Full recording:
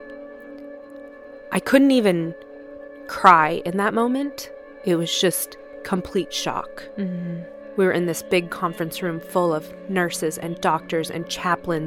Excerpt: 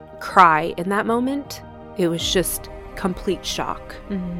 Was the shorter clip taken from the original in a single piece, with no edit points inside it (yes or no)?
yes